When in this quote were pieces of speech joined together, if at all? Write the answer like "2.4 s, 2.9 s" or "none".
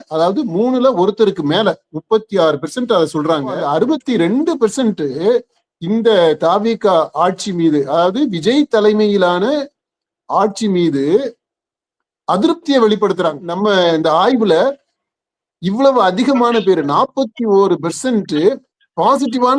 3.6 s, 13.5 s